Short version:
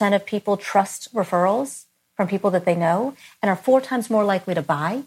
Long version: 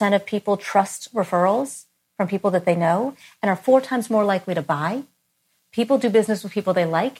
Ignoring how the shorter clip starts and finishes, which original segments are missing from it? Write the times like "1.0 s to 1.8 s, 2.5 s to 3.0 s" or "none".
none